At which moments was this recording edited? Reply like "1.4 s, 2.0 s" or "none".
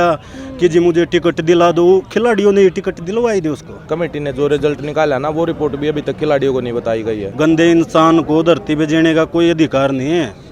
3.8 s, 7.3 s